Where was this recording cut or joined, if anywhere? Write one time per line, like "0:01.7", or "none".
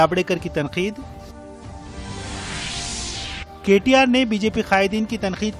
none